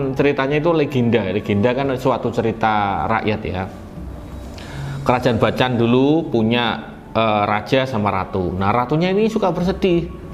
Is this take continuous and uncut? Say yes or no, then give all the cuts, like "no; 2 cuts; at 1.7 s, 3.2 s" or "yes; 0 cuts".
yes; 0 cuts